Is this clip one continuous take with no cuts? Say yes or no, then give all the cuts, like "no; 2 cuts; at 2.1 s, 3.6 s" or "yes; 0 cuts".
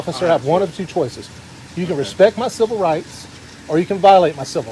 yes; 0 cuts